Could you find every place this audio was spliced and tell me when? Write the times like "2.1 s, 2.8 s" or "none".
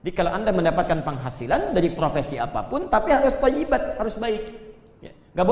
none